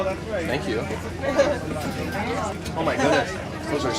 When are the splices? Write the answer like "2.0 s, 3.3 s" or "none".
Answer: 2.5 s